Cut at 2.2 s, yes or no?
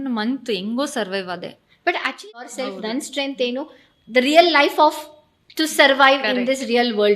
yes